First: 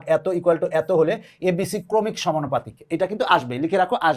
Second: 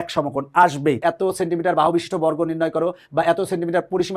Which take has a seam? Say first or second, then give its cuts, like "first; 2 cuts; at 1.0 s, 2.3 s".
second; 1 cut; at 1.0 s